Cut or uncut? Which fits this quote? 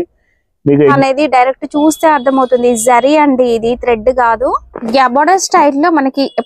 cut